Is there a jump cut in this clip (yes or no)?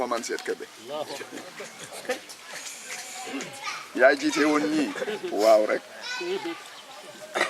no